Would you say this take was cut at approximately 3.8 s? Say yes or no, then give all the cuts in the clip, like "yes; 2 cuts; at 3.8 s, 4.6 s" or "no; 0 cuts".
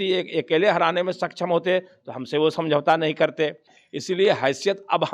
yes; 1 cut; at 3.8 s